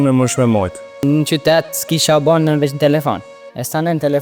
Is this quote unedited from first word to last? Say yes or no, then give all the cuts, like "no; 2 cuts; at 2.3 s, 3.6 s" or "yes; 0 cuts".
no; 1 cut; at 1.0 s